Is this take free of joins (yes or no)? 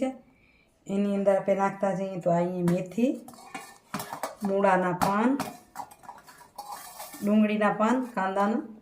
yes